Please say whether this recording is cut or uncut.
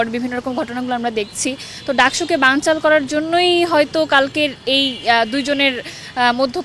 uncut